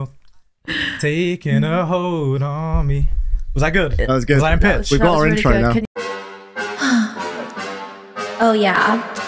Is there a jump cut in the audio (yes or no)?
yes